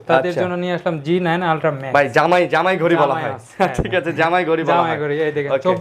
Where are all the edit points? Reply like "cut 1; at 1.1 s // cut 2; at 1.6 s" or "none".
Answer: none